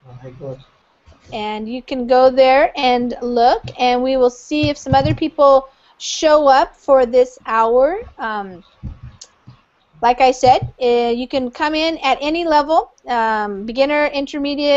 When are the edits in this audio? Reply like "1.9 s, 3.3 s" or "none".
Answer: 10.0 s